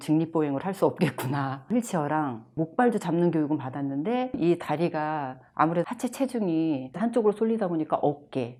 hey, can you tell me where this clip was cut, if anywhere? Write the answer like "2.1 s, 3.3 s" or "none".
none